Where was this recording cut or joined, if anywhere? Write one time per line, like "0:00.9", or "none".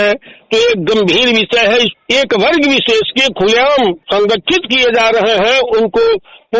0:01.9